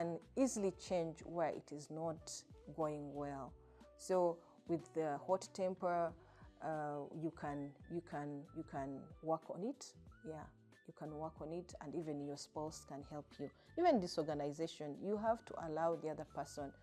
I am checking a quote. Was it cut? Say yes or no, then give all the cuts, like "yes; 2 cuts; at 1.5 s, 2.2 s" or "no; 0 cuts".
no; 0 cuts